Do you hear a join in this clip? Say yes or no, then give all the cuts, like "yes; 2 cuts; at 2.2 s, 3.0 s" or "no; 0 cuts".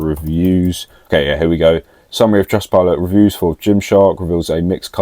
yes; 1 cut; at 1.0 s